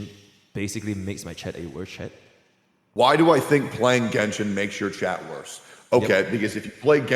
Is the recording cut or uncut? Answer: cut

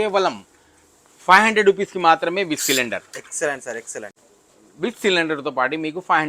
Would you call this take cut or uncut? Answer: uncut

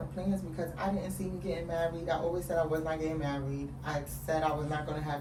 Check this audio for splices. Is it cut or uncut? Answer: uncut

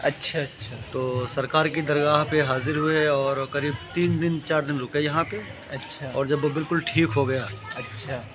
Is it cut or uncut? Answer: uncut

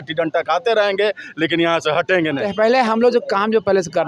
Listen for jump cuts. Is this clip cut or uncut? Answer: cut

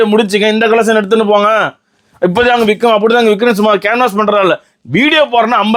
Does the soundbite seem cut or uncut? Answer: uncut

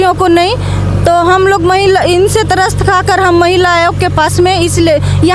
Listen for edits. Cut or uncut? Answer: uncut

